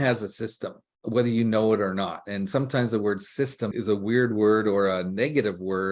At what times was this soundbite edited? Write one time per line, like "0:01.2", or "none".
0:03.7